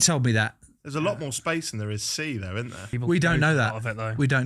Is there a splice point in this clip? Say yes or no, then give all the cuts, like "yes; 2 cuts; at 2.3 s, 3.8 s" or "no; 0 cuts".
yes; 1 cut; at 2.9 s